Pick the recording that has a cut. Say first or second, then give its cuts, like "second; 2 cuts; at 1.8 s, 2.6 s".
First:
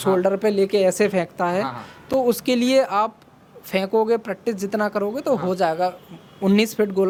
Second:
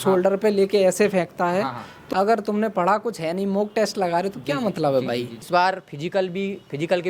second; 2 cuts; at 2.0 s, 5.3 s